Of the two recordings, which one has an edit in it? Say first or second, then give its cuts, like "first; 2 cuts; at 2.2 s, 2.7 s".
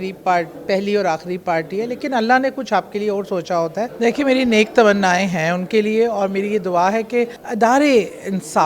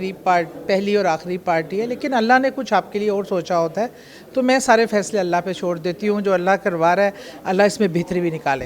first; 2 cuts; at 3.9 s, 7.4 s